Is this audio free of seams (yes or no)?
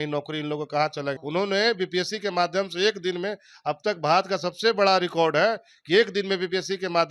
no